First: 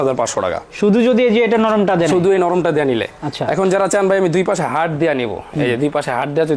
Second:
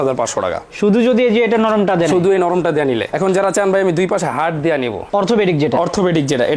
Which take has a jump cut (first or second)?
second